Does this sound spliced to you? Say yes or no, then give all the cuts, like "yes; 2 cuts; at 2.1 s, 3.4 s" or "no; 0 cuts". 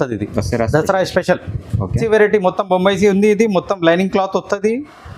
yes; 1 cut; at 2.0 s